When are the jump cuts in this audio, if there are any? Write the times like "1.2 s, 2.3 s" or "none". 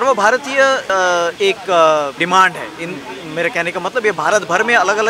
0.8 s, 2.1 s